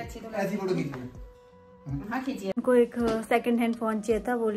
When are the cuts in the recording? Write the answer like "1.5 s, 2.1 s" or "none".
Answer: 2.6 s